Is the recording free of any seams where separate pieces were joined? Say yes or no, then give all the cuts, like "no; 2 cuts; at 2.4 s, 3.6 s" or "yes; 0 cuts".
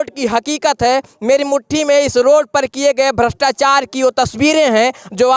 yes; 0 cuts